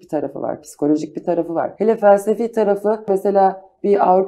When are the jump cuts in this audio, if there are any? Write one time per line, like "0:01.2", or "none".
0:01.7
0:03.1